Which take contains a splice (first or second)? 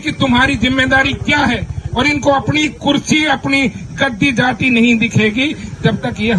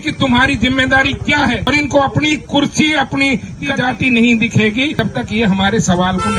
second